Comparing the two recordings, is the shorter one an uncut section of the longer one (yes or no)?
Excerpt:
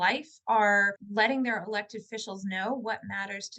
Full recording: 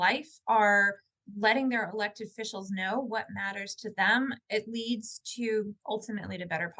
no